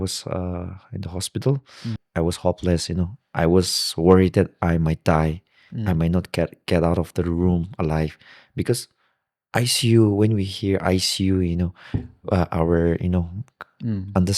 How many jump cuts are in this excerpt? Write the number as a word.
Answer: one